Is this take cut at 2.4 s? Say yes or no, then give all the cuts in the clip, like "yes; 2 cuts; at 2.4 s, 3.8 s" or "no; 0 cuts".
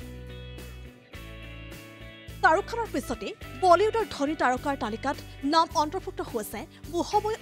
yes; 1 cut; at 2.4 s